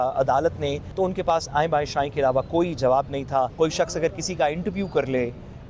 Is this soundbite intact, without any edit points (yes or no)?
no